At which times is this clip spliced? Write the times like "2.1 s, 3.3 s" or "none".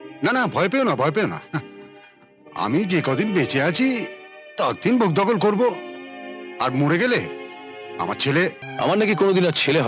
8.6 s